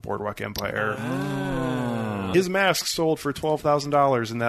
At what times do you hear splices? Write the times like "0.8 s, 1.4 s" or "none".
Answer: 2.2 s